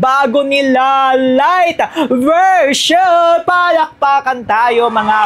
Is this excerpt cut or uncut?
uncut